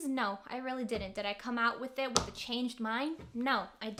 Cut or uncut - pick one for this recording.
uncut